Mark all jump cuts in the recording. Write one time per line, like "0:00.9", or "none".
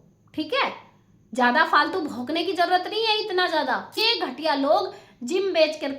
0:04.0